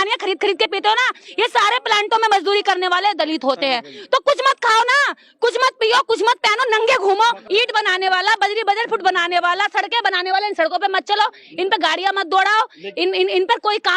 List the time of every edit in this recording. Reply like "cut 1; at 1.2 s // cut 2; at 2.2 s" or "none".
cut 1; at 7.4 s